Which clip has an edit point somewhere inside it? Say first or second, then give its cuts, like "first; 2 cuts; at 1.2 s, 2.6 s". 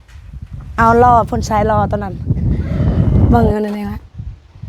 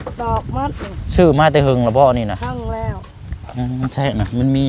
first; 1 cut; at 3.3 s